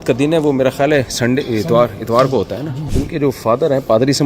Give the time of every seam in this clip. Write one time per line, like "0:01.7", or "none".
0:02.8

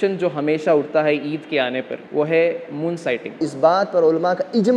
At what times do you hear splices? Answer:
0:02.0
0:03.5

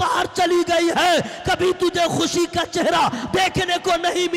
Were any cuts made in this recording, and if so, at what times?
none

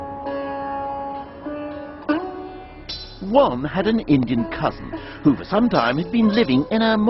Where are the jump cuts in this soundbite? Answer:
none

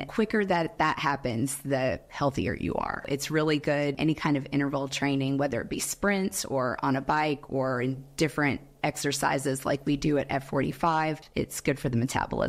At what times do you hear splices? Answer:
0:03.1
0:04.0
0:11.2

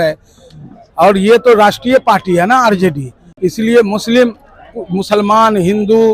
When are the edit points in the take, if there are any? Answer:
none

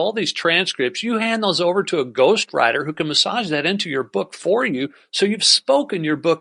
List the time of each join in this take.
none

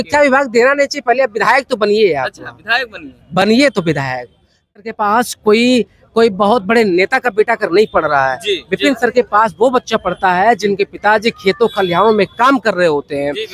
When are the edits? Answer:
0:04.8

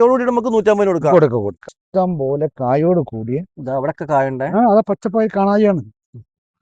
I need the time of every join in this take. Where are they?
0:01.7

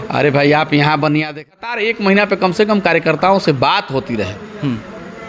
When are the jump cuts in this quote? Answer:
0:01.5

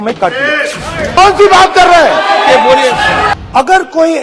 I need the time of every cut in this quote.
0:01.2
0:03.3

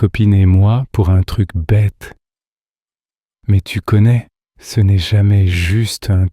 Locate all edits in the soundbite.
0:02.9

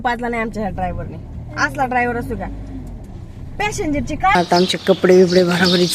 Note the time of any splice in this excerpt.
0:04.4

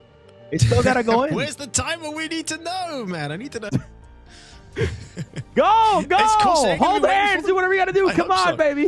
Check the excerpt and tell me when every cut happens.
0:03.6

